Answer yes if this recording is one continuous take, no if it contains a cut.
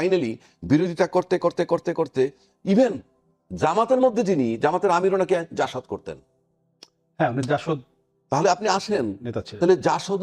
yes